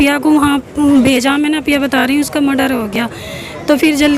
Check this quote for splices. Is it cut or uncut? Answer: uncut